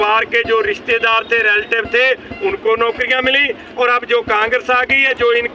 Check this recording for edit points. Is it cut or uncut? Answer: uncut